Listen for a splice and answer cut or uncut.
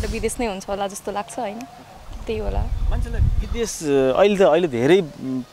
uncut